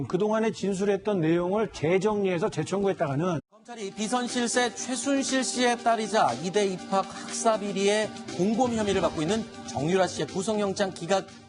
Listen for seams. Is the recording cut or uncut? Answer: uncut